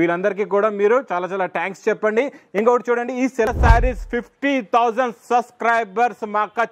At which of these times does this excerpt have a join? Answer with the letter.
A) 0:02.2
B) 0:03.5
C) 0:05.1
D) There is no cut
B